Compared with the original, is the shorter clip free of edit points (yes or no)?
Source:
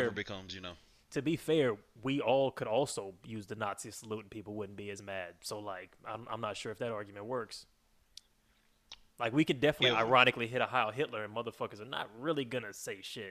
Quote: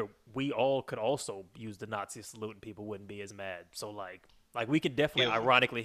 no